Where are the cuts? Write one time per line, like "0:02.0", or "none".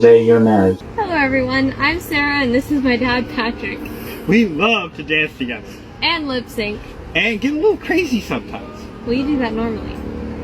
0:00.9